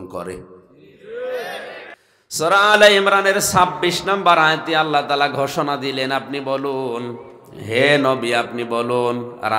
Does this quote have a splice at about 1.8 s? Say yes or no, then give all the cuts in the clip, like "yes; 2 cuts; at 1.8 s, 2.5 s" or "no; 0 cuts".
yes; 1 cut; at 1.8 s